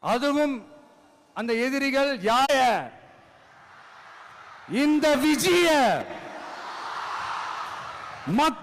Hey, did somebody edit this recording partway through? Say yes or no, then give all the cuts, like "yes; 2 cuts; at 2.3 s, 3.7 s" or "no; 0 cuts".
yes; 1 cut; at 2.5 s